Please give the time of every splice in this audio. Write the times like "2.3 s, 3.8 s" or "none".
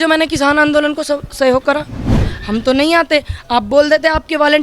2.1 s